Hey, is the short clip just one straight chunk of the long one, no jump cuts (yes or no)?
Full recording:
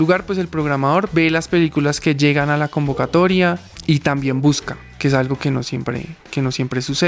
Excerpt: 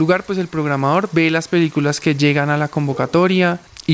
yes